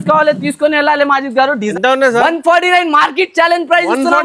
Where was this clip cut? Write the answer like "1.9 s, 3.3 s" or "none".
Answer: 1.7 s

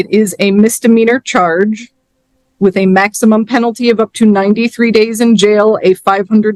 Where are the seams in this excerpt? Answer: none

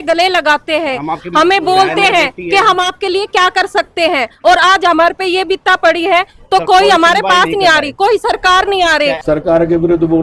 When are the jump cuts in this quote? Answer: 9.2 s

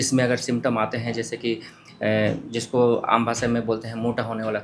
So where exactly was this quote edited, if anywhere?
none

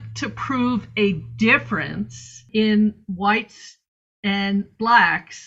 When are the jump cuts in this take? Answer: 2.5 s

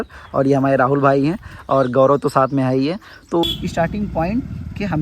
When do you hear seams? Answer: 3.4 s

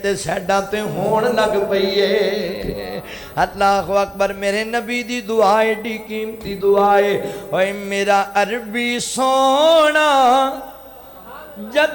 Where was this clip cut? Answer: none

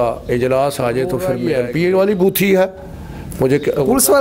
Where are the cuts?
1.4 s

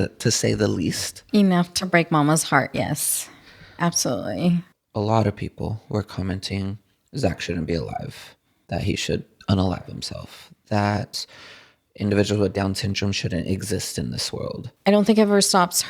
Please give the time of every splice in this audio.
4.8 s, 14.7 s

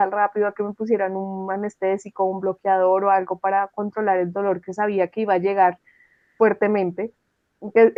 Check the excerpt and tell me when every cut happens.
none

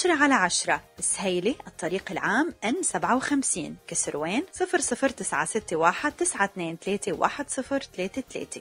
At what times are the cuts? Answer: none

